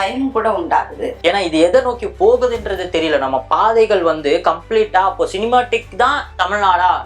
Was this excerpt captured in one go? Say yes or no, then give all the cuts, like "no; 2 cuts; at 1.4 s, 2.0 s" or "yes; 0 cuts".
no; 1 cut; at 1.2 s